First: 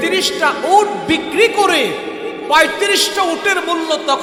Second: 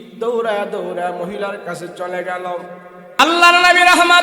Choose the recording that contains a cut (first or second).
second